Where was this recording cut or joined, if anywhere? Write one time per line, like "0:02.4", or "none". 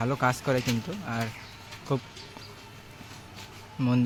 none